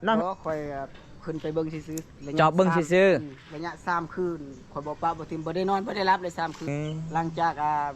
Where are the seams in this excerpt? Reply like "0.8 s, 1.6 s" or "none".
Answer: 6.6 s